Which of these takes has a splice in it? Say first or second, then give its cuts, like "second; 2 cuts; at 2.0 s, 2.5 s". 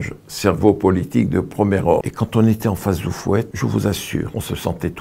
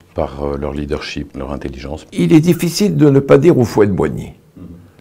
first; 3 cuts; at 2.1 s, 3.5 s, 4.3 s